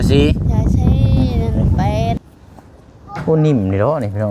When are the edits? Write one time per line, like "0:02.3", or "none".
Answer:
0:02.2